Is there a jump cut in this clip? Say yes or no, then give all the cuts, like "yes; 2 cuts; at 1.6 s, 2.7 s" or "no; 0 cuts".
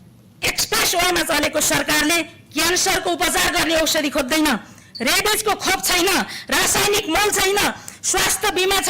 no; 0 cuts